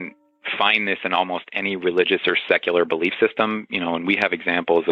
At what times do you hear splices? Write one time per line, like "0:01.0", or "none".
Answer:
none